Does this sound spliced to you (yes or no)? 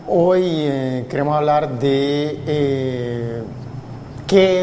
no